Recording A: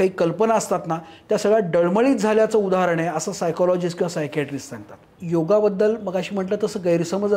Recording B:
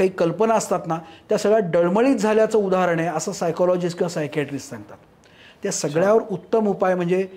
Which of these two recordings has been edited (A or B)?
A